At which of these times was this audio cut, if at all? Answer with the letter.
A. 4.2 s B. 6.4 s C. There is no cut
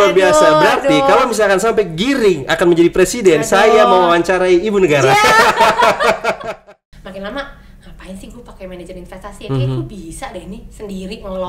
B